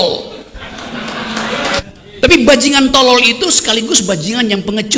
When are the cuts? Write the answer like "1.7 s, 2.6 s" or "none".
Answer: 1.8 s

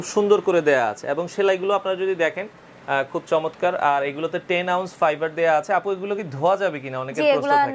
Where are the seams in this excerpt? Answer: none

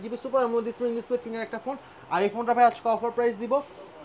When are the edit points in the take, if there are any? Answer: none

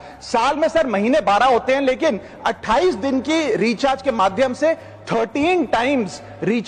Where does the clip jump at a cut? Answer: none

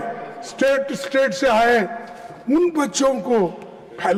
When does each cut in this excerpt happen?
none

